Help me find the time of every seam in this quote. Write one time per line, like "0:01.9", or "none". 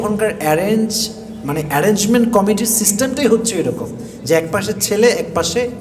none